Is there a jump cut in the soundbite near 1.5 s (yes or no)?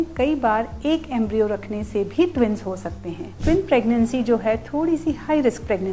no